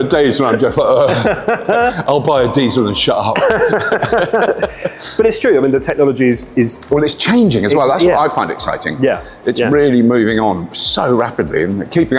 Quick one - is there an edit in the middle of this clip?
no; 0 cuts

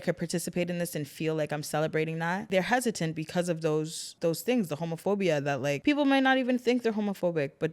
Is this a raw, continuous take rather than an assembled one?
no; 3 cuts; at 2.5 s, 4.1 s, 5.8 s

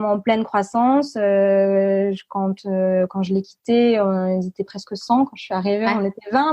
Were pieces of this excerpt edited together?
no; 0 cuts

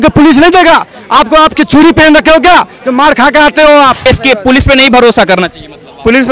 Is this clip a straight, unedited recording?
no; 1 cut; at 4.0 s

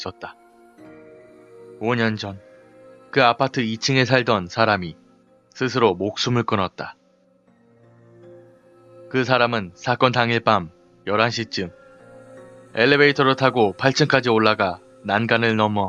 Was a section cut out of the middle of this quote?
no; 0 cuts

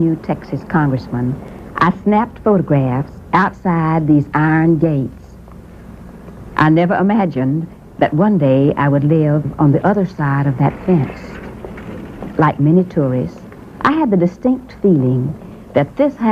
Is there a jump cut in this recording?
yes; 1 cut; at 14.0 s

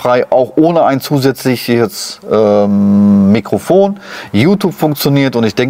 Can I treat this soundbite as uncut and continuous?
yes; 0 cuts

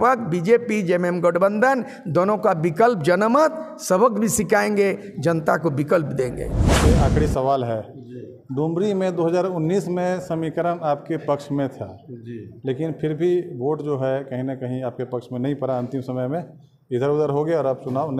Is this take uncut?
no; 1 cut; at 6.9 s

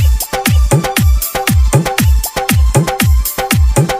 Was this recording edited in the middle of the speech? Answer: no; 0 cuts

